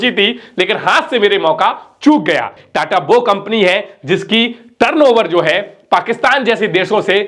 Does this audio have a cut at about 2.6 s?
yes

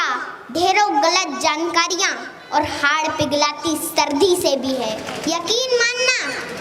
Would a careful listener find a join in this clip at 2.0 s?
no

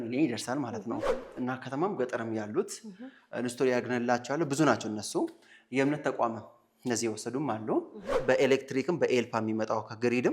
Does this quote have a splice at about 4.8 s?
no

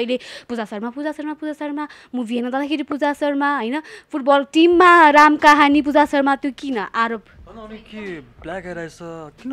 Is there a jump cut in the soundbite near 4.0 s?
no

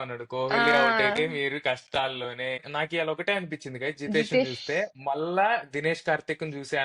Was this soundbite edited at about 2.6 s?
yes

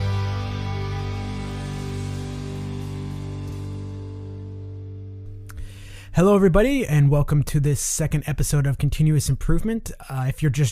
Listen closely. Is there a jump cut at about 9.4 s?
no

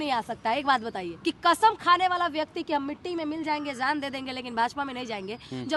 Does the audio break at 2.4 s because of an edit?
no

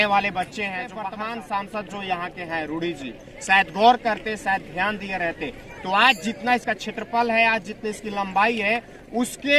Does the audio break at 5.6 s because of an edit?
no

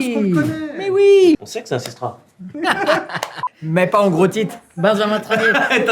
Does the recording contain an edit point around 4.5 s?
no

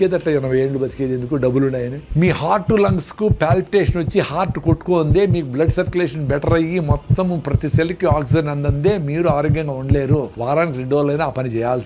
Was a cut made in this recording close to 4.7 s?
no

